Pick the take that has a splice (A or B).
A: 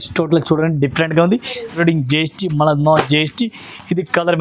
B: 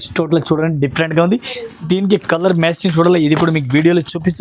A